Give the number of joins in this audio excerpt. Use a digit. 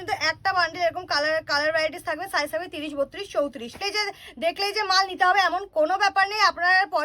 1